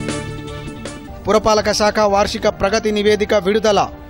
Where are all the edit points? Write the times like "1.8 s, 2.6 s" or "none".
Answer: 1.0 s